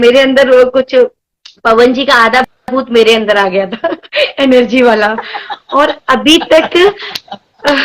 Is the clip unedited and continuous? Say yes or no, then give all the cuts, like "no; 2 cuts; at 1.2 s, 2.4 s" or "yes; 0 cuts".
yes; 0 cuts